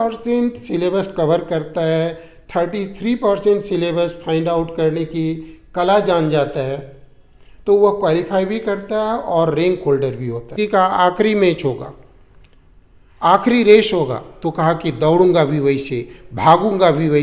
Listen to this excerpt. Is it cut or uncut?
cut